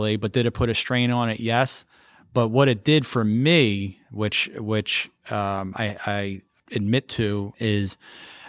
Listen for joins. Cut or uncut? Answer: cut